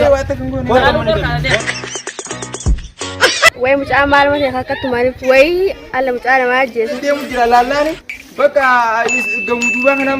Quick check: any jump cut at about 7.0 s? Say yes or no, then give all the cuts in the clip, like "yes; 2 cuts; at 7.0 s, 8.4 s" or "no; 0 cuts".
yes; 1 cut; at 7.0 s